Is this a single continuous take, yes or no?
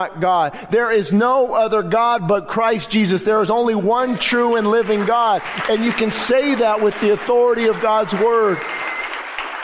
yes